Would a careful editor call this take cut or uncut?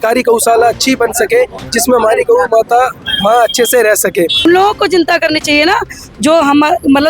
cut